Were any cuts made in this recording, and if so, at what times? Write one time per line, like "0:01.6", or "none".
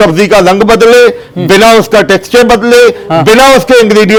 none